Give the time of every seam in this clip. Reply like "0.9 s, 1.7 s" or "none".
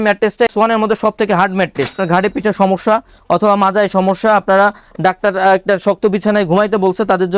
1.9 s